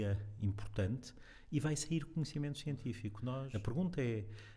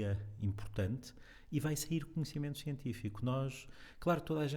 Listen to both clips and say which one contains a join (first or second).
first